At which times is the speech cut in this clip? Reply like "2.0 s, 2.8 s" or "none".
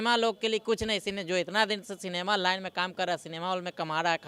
none